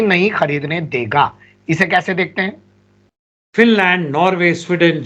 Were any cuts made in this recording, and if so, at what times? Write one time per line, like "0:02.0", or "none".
none